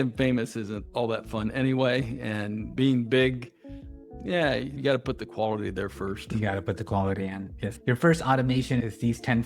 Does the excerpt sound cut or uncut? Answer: uncut